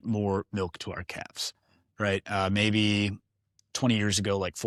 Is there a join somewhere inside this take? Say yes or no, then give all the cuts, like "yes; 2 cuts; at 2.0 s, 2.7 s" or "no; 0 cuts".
no; 0 cuts